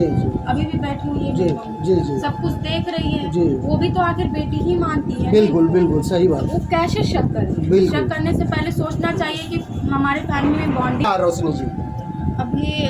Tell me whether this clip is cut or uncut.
cut